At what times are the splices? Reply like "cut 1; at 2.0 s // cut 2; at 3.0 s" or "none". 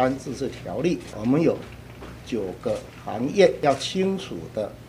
cut 1; at 1.1 s // cut 2; at 3.6 s